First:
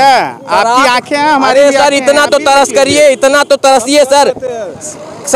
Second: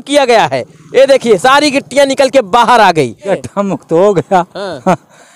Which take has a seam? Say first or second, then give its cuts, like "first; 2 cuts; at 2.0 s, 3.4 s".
second; 1 cut; at 3.3 s